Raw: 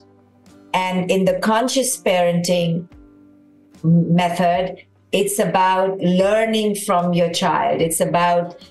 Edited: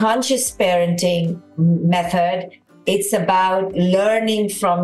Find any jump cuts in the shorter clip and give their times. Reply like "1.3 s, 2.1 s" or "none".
1.4 s